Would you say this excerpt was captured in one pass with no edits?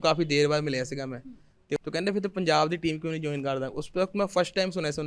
no; 1 cut; at 1.8 s

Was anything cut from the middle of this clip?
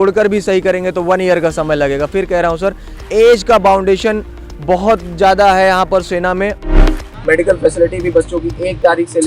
yes; 1 cut; at 6.6 s

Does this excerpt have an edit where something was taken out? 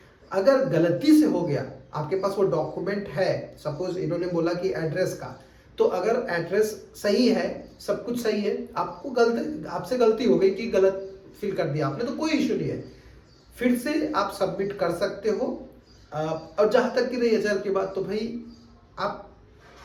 no; 0 cuts

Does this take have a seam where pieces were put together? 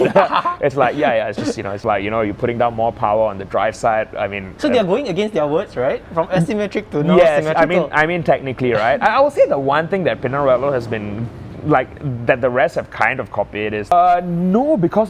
yes; 2 cuts; at 1.8 s, 13.9 s

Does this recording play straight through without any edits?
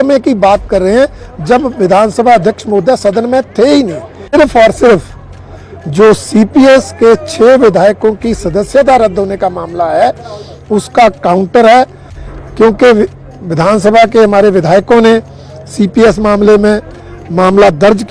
no; 1 cut; at 4.3 s

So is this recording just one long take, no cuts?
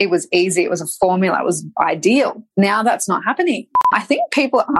no; 2 cuts; at 2.4 s, 3.9 s

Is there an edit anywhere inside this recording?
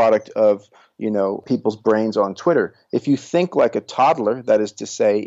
yes; 1 cut; at 1.4 s

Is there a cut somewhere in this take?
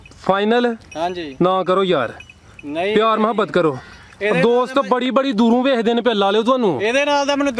no; 0 cuts

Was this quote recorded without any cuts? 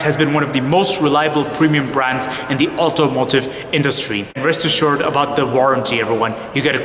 yes; 0 cuts

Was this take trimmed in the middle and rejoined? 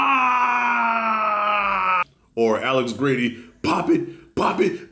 yes; 1 cut; at 2.0 s

